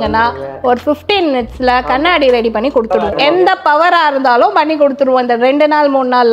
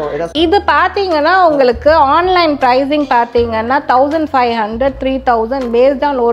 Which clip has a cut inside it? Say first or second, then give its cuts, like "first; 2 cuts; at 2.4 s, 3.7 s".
first; 1 cut; at 3.0 s